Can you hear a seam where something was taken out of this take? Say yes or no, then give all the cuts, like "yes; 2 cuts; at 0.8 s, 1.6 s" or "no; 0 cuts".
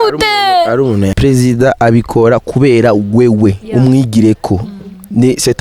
yes; 1 cut; at 1.1 s